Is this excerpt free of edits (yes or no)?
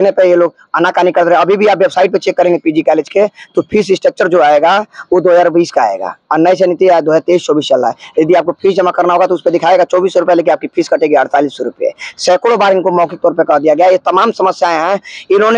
yes